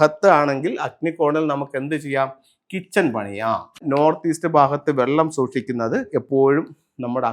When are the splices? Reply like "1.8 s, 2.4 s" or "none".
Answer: 3.8 s, 6.1 s